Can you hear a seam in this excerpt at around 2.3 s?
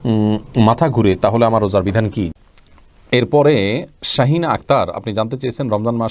yes; 1 cut; at 2.3 s

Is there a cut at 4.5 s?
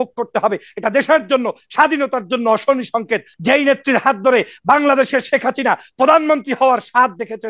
no; 1 cut; at 3.3 s

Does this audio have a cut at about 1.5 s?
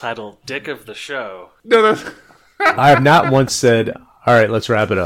yes; 1 cut; at 1.5 s

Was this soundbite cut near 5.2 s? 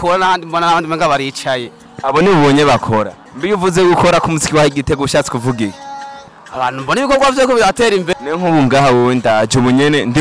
no; 2 cuts; at 3.2 s, 8.1 s

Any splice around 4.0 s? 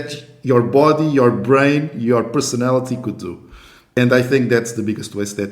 yes; 1 cut; at 4.0 s

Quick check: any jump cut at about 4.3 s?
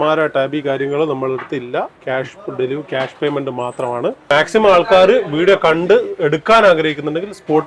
yes; 1 cut; at 4.3 s

